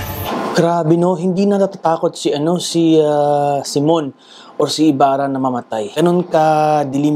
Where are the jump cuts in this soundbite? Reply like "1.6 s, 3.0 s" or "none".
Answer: 5.9 s

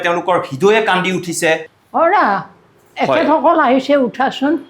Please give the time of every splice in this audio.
1.7 s

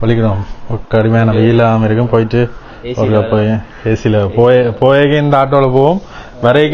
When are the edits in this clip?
none

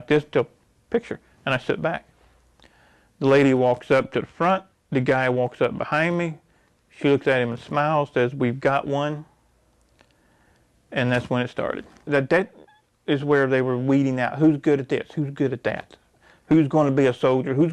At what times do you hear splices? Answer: 12.1 s

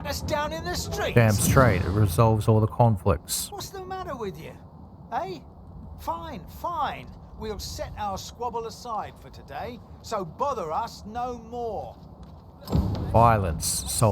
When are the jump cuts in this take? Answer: none

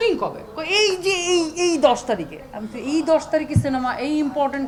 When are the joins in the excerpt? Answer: none

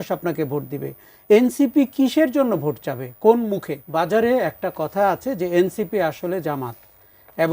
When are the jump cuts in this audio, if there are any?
3.8 s

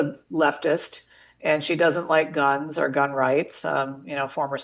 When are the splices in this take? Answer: none

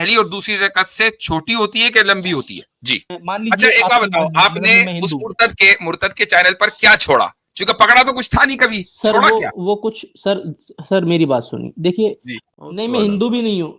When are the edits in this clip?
3.2 s, 12.3 s

